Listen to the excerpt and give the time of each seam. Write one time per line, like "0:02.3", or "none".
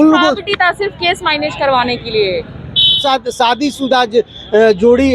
0:03.0